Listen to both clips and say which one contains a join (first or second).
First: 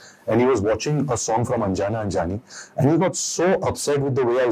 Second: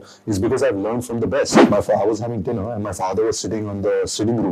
second